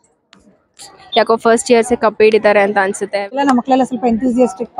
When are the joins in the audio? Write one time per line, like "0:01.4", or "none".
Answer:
0:03.3